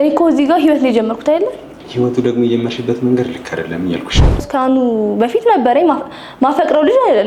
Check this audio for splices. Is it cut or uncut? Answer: cut